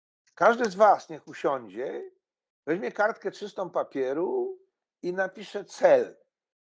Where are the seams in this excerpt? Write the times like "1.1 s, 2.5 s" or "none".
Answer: none